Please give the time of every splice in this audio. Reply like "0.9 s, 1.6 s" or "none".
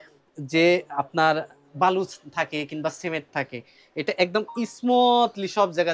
none